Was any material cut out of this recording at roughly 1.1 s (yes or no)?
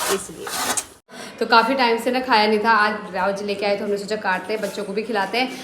yes